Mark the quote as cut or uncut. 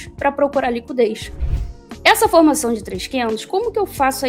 cut